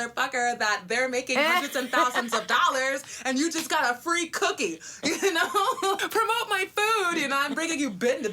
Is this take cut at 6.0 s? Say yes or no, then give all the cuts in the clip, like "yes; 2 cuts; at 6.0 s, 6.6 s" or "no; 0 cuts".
yes; 1 cut; at 6.0 s